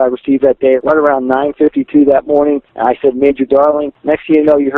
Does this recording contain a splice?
yes; 3 cuts; at 0.8 s, 2.7 s, 3.9 s

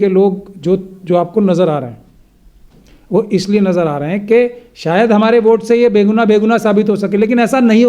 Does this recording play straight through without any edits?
yes; 0 cuts

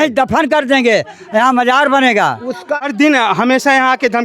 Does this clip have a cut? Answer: yes; 1 cut; at 2.8 s

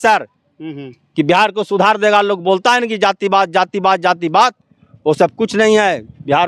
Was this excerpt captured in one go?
yes; 0 cuts

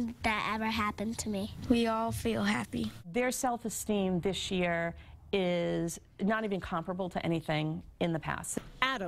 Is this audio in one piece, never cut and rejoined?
no; 1 cut; at 7.6 s

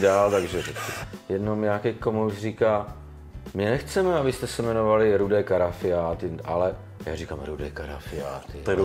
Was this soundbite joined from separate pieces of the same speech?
yes; 1 cut; at 0.9 s

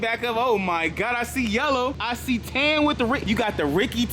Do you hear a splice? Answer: yes; 2 cuts; at 2.0 s, 3.2 s

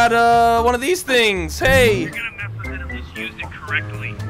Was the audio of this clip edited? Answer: no; 0 cuts

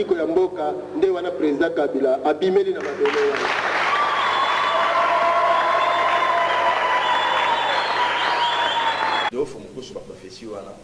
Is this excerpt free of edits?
no; 1 cut; at 9.3 s

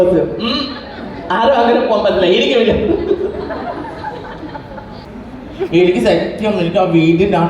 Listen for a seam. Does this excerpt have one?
yes; 1 cut; at 5.1 s

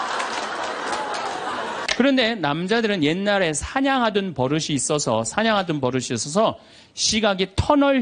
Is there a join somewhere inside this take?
yes; 1 cut; at 1.8 s

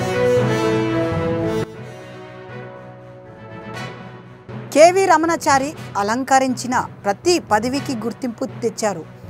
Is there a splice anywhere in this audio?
yes; 3 cuts; at 1.3 s, 3.6 s, 4.6 s

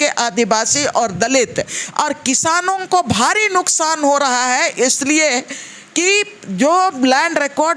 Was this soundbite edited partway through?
no; 0 cuts

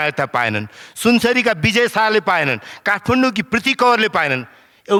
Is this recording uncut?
yes; 0 cuts

